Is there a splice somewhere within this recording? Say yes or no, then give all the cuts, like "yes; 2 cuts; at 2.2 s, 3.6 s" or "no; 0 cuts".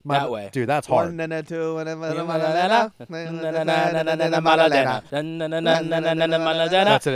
yes; 1 cut; at 5.1 s